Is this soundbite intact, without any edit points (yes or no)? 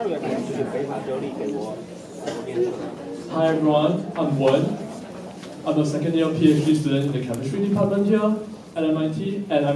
yes